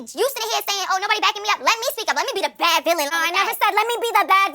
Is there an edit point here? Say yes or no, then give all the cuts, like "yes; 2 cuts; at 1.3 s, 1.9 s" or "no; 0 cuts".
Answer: yes; 1 cut; at 3.1 s